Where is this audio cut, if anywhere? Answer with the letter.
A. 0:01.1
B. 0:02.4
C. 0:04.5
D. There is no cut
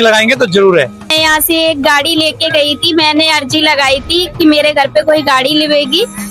A